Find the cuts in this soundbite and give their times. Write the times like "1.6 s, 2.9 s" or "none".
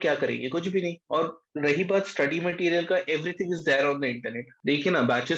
4.4 s